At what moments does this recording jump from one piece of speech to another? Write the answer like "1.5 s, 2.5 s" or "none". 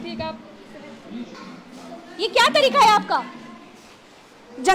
1.4 s